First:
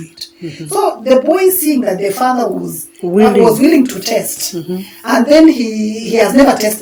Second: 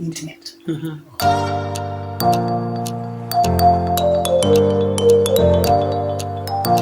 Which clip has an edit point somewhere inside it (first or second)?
second